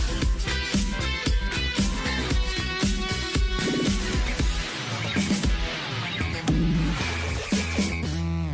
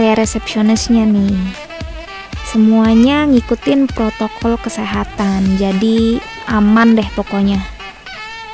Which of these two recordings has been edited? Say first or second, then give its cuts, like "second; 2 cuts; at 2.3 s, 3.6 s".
second; 1 cut; at 7.6 s